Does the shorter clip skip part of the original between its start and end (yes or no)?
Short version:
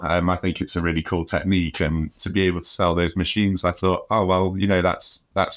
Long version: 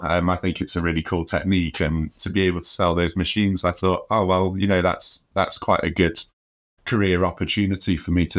no